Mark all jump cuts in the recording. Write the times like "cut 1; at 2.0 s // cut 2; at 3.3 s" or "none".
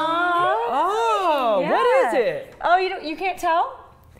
none

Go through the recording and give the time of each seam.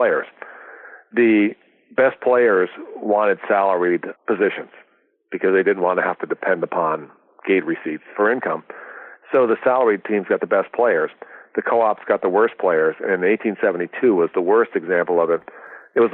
cut 1; at 4.1 s // cut 2; at 8.1 s

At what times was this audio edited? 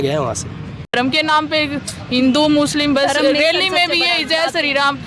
cut 1; at 0.9 s

